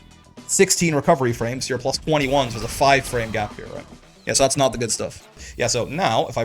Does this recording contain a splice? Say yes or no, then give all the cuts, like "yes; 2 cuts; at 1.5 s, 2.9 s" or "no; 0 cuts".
yes; 1 cut; at 5.4 s